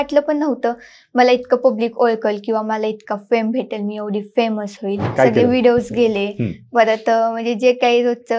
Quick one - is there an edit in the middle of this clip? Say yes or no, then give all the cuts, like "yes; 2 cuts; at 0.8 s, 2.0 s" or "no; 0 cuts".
yes; 1 cut; at 5.1 s